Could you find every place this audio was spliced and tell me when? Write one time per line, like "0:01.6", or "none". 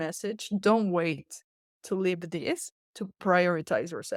none